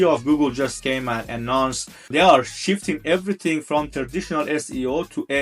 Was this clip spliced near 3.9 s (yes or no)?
yes